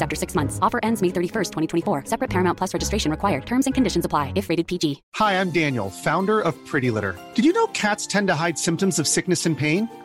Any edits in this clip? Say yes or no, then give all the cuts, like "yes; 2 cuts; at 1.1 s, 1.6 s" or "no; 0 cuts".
yes; 1 cut; at 5.0 s